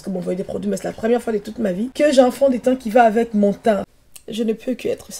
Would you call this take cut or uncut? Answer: cut